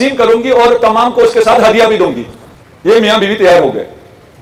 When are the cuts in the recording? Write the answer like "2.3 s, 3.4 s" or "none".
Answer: none

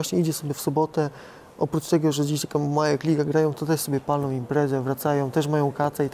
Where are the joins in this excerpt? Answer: none

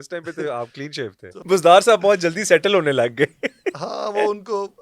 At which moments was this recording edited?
1.3 s

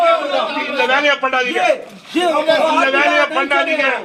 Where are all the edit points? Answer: none

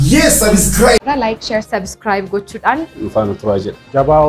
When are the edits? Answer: 1.0 s

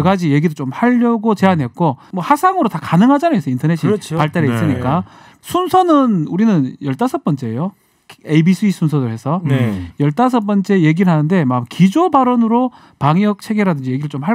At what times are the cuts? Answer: 2.1 s, 5.3 s

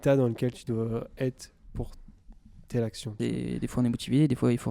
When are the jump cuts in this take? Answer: 3.1 s

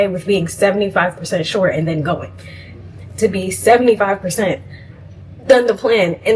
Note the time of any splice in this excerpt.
none

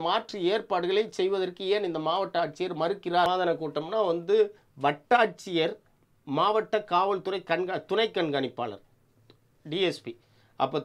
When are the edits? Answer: 3.3 s

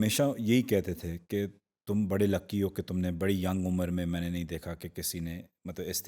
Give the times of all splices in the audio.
none

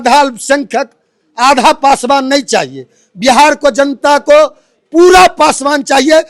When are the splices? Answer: none

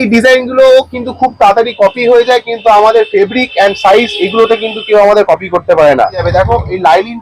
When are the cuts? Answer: 6.2 s

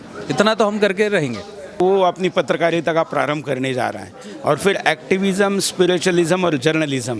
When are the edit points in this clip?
1.8 s

